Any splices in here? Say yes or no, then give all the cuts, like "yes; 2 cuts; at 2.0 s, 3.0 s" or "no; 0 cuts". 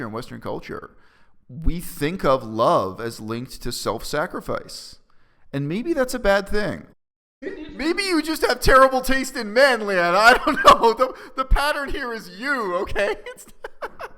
yes; 1 cut; at 6.8 s